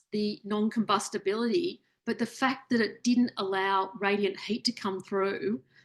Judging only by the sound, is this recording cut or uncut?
uncut